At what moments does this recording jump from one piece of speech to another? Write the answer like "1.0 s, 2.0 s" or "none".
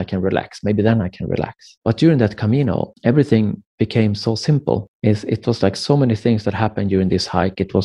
1.6 s, 2.9 s, 4.9 s